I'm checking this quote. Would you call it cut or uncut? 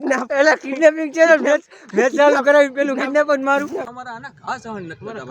cut